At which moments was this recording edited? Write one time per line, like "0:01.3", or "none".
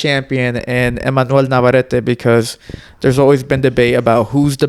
none